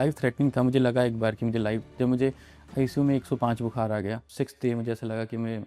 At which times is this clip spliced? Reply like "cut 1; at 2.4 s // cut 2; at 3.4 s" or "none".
cut 1; at 4.3 s